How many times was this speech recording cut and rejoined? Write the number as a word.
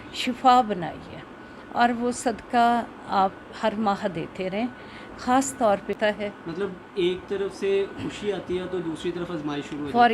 one